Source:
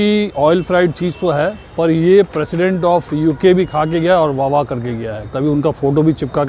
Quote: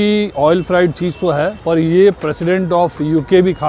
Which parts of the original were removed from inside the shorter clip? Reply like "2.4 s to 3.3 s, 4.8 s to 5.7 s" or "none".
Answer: 1.6 s to 1.7 s

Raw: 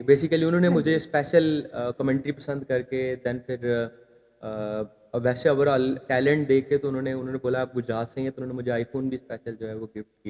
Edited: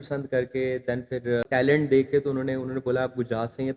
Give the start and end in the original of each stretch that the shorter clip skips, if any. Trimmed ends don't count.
3.8 s to 6.0 s

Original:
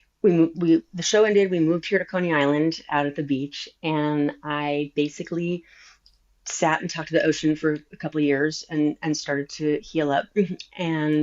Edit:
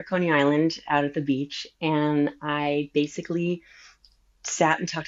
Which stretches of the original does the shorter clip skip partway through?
none

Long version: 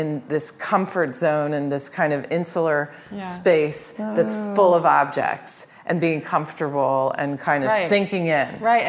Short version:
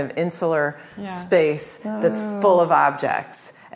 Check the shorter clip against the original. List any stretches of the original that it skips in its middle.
none

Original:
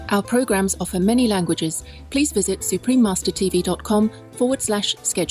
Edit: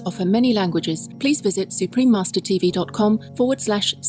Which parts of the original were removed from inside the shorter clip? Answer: 1.8 s to 1.9 s, 4.2 s to 4.3 s

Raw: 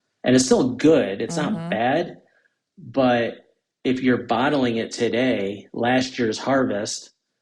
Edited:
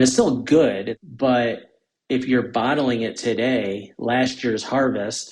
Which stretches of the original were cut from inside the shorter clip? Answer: 1.3 s to 2.7 s

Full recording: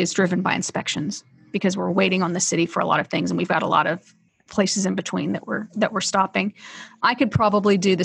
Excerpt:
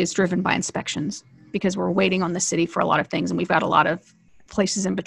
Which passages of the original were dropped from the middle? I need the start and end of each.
none

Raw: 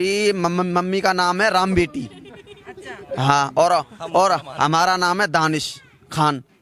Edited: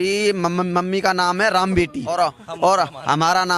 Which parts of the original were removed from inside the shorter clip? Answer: 2.1 s to 3.7 s

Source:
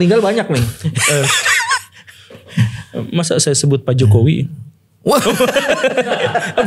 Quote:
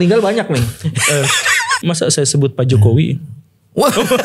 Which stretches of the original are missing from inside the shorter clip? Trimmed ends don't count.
1.8 s to 3.1 s

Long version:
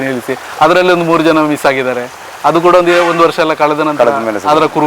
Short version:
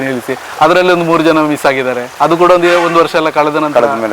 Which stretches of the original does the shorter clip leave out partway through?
2.0 s to 2.3 s

